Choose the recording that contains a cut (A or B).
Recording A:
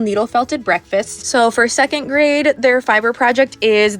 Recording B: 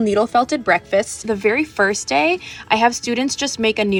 A